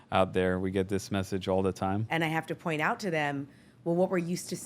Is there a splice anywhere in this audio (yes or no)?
yes